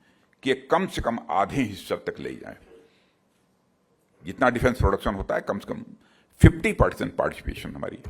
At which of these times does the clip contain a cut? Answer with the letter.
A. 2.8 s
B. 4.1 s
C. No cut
C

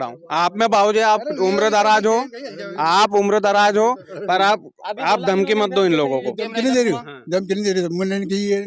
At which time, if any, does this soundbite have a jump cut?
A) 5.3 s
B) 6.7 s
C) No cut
C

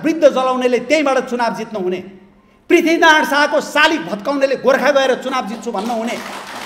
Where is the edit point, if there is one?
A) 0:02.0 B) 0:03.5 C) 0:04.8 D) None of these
D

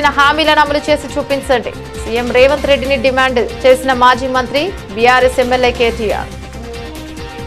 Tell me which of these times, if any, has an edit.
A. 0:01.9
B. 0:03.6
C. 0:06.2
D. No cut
C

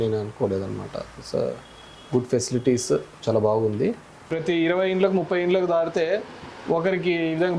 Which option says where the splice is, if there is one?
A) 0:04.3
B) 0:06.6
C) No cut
A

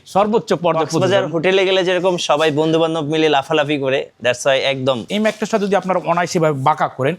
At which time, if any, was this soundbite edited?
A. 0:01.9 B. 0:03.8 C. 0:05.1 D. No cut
C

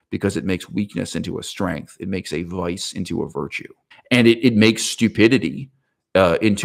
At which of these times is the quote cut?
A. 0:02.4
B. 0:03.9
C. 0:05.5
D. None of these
D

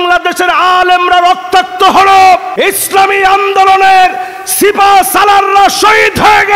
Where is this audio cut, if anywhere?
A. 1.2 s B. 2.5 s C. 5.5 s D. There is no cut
B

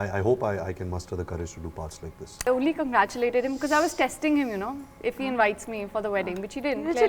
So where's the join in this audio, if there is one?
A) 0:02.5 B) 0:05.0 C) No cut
A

